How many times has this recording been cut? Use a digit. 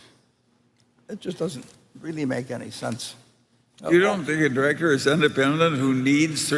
0